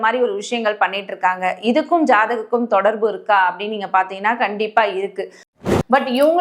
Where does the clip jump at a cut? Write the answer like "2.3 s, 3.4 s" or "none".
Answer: 5.5 s